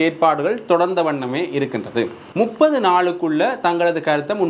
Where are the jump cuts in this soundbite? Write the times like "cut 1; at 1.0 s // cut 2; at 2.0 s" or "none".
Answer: cut 1; at 2.2 s